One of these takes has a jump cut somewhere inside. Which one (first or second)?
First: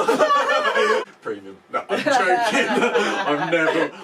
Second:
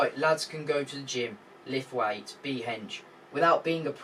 first